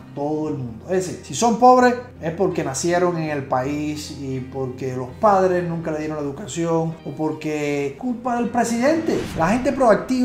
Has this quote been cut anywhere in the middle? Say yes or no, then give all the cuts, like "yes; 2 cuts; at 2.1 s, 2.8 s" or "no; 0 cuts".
yes; 1 cut; at 9.3 s